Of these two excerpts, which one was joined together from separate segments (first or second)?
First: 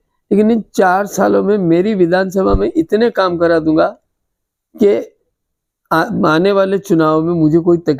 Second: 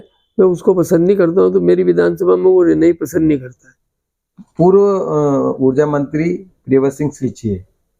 second